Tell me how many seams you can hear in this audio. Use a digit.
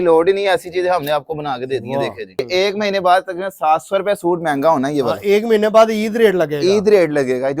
1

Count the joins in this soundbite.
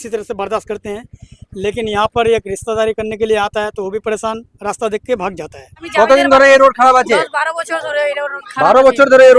1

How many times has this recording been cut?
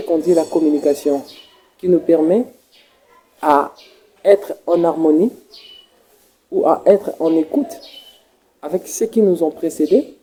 0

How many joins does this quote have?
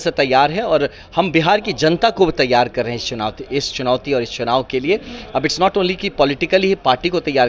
0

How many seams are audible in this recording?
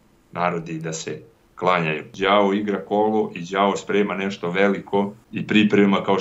2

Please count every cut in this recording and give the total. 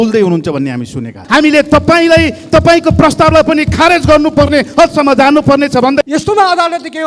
2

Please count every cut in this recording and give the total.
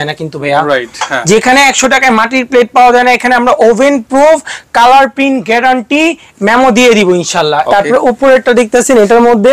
1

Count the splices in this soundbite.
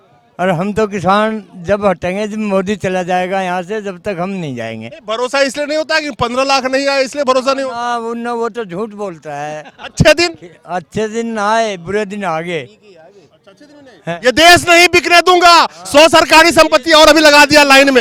0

